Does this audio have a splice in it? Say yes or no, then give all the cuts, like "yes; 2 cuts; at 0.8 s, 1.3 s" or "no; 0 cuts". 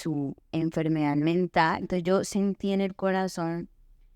yes; 1 cut; at 1.9 s